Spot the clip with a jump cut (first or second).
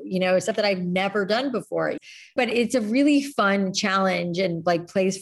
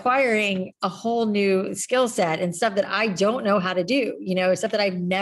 first